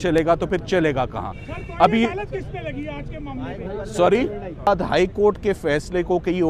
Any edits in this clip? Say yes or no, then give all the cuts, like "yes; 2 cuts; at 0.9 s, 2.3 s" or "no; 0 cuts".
yes; 1 cut; at 4.7 s